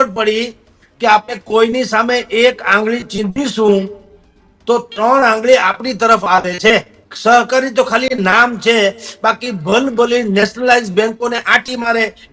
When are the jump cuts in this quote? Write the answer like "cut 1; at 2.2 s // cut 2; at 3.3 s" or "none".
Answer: cut 1; at 7.0 s